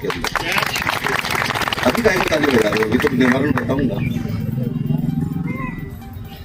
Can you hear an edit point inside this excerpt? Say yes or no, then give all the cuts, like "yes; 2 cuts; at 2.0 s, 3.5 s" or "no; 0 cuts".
no; 0 cuts